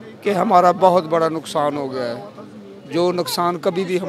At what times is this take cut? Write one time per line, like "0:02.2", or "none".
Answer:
none